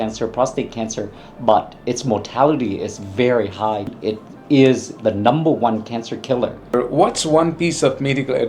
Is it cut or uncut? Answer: cut